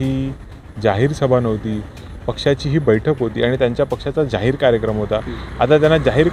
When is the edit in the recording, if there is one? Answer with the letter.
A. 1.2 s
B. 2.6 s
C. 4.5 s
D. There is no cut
D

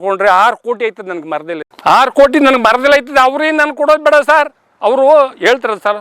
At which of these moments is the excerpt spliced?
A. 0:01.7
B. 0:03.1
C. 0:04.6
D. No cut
D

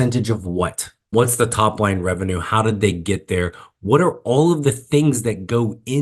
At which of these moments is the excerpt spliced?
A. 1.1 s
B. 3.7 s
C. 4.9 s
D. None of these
A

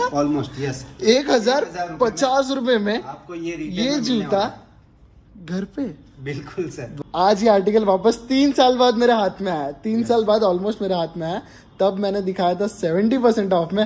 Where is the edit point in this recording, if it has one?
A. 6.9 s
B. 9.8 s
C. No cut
A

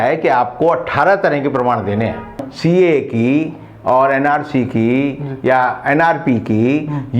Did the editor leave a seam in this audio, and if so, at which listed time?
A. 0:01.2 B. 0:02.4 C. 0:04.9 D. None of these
B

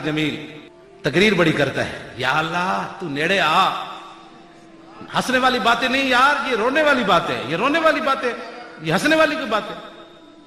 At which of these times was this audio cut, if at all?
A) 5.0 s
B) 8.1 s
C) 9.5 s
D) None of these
D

